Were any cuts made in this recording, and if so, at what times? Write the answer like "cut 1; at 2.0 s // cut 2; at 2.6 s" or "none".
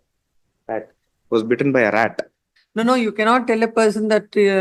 cut 1; at 2.5 s